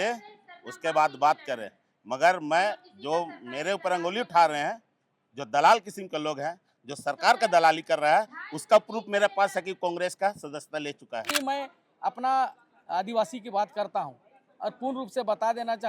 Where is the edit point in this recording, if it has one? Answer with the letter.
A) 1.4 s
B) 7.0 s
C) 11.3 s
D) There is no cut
C